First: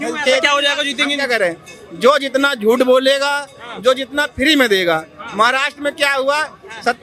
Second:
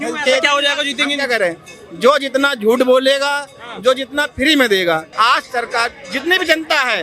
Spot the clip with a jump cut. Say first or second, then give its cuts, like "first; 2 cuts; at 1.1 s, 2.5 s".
second; 1 cut; at 5.1 s